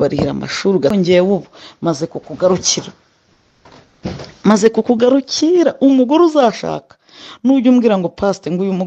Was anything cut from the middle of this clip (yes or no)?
yes